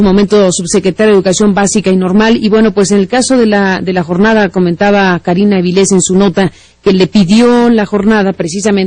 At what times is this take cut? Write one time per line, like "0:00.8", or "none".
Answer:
none